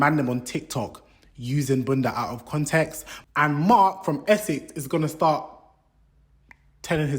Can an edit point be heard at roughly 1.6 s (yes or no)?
no